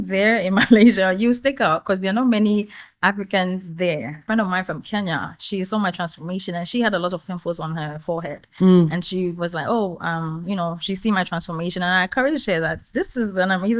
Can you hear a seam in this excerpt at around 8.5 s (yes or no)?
no